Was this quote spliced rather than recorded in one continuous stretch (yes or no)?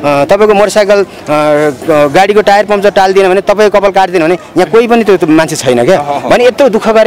no